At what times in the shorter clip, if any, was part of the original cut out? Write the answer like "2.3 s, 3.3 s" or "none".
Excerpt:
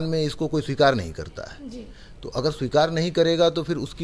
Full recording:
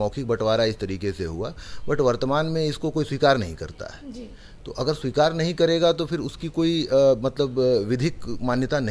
none

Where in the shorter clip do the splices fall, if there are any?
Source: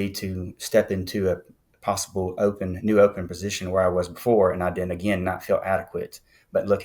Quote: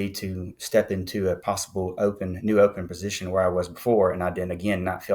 1.4 s

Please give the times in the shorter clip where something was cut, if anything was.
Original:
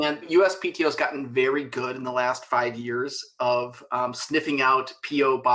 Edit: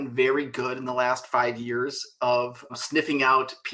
2.7 s

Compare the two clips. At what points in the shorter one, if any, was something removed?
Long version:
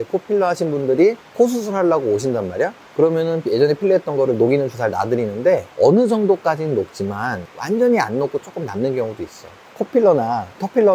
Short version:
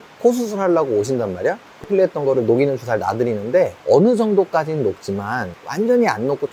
1.8 s

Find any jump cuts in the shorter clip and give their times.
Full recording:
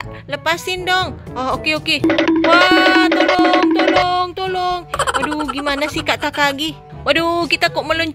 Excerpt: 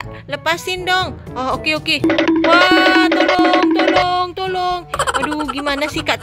none

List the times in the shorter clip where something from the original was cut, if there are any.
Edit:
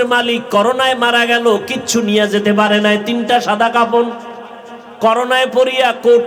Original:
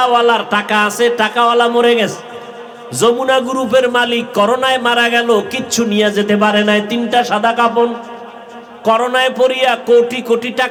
none

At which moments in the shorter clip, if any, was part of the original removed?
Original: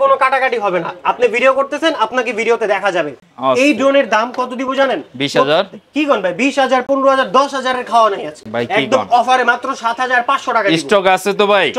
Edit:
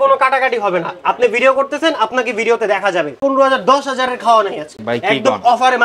3.2 s

